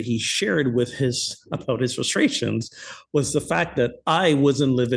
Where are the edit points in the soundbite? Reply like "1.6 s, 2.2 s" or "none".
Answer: none